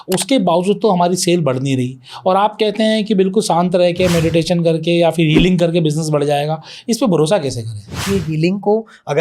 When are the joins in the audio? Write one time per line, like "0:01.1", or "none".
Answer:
0:08.0